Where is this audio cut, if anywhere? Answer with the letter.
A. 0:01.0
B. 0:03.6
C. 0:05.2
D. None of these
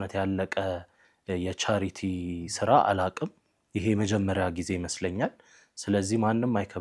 D